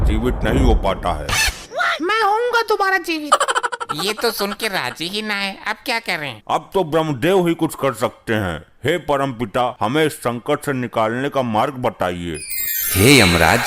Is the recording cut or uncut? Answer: uncut